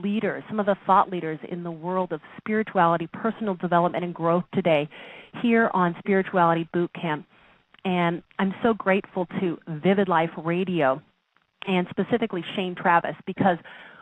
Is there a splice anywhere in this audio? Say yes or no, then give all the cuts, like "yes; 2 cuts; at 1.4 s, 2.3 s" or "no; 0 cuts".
no; 0 cuts